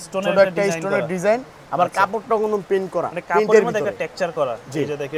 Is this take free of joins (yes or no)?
yes